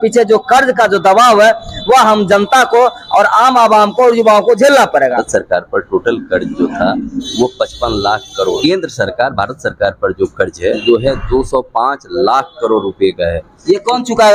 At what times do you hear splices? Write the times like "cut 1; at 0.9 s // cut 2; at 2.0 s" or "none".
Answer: cut 1; at 5.2 s // cut 2; at 8.6 s // cut 3; at 10.8 s